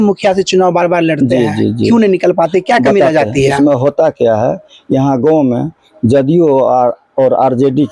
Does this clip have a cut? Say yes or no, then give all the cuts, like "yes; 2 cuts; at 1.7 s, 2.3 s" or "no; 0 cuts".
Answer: no; 0 cuts